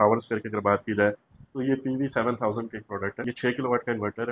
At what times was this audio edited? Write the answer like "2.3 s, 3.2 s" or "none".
3.3 s